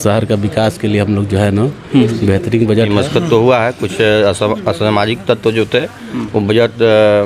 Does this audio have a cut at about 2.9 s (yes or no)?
yes